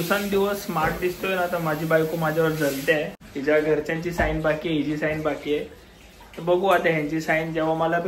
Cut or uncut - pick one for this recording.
cut